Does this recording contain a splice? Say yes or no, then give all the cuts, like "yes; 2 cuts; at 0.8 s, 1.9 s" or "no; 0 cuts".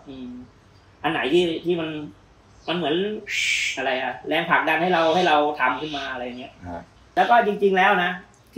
yes; 1 cut; at 6.9 s